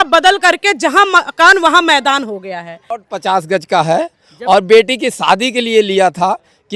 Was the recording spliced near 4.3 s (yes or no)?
no